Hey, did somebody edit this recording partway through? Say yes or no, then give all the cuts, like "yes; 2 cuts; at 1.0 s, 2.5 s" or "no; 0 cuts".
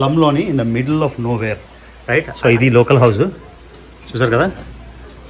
yes; 1 cut; at 2.0 s